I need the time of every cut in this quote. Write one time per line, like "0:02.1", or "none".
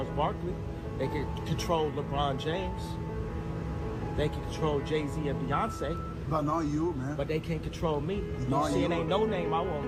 none